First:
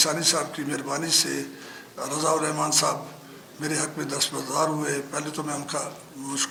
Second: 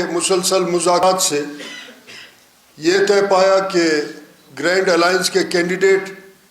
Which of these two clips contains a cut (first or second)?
second